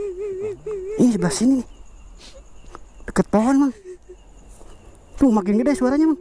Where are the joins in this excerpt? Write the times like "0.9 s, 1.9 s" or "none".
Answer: 1.0 s